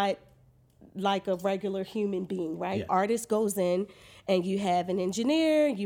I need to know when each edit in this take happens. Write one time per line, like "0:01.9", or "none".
0:02.9